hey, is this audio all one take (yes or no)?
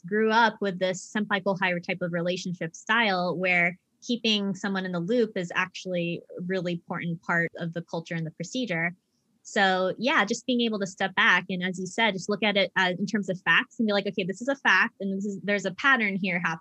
no